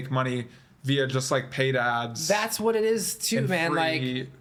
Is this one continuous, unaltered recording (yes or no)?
yes